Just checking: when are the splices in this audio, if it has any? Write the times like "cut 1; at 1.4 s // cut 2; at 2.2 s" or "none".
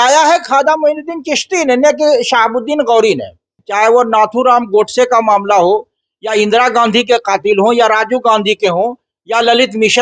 cut 1; at 3.6 s